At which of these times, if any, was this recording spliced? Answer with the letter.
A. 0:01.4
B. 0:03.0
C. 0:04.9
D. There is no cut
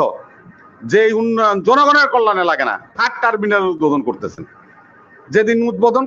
B